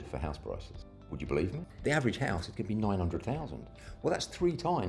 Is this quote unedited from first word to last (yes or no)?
no